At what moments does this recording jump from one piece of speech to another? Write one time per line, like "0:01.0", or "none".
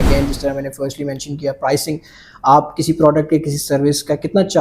none